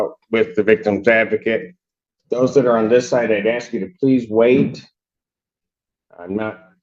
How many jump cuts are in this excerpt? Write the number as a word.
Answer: zero